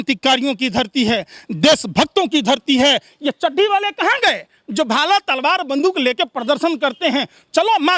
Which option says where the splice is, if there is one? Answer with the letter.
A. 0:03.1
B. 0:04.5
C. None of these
C